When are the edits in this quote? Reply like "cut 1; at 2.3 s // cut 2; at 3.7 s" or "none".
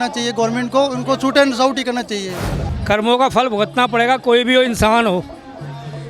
cut 1; at 2.7 s